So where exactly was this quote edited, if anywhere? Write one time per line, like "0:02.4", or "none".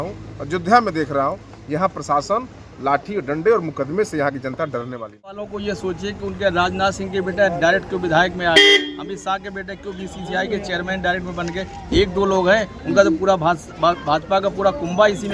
0:05.5